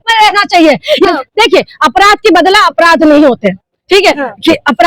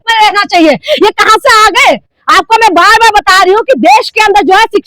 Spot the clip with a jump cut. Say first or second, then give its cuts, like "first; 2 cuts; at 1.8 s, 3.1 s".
first; 1 cut; at 1.1 s